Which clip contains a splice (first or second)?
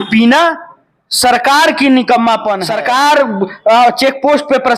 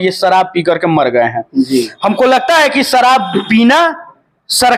first